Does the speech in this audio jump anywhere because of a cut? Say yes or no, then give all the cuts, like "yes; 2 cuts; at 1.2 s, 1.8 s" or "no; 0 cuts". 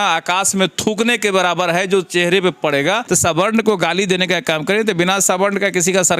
yes; 1 cut; at 3.0 s